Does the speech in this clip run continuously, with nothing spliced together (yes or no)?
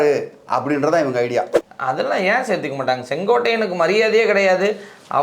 no